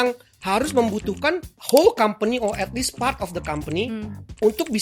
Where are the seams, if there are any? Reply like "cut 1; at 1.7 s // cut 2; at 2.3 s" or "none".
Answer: cut 1; at 1.5 s